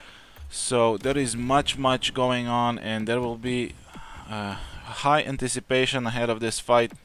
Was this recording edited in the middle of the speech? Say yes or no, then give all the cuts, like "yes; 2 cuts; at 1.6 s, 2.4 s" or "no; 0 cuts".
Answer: no; 0 cuts